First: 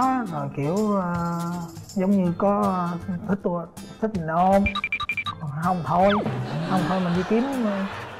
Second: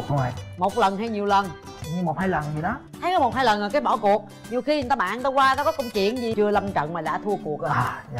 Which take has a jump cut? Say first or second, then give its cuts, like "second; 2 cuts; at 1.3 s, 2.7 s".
second; 1 cut; at 6.3 s